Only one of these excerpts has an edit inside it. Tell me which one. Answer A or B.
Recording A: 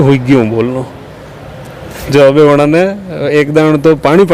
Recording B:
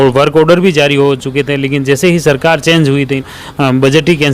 B